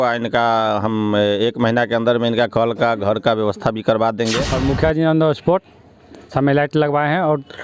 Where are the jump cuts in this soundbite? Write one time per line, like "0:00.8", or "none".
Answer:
0:04.5